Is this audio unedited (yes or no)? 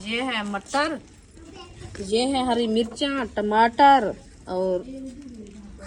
yes